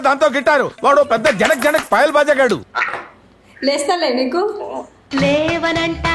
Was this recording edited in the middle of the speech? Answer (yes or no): no